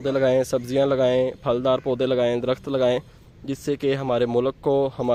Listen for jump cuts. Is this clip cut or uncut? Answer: uncut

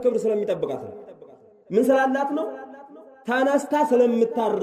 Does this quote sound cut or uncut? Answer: uncut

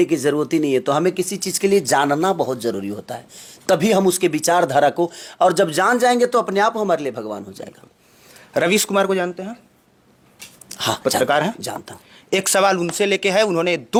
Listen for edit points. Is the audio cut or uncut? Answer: uncut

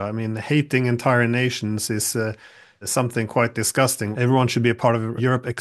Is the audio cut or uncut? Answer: cut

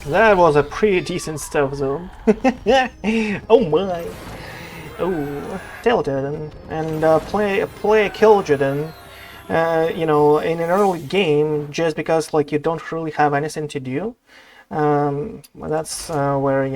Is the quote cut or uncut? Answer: cut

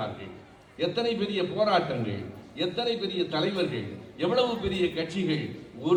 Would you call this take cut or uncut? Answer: uncut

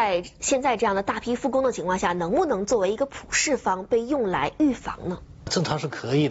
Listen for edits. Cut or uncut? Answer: uncut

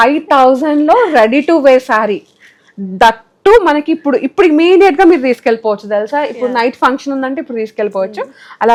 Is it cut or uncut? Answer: uncut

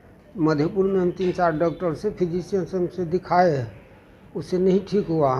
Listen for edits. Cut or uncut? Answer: uncut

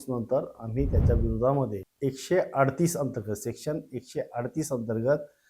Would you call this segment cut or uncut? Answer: cut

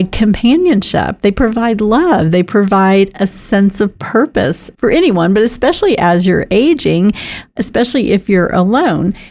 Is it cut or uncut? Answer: uncut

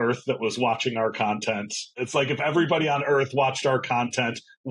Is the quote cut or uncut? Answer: cut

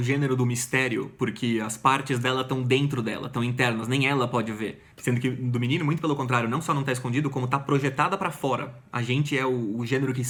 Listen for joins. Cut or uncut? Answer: uncut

